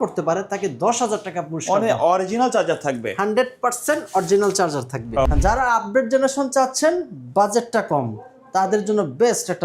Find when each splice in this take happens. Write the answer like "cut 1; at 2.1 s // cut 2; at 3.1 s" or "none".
cut 1; at 5.3 s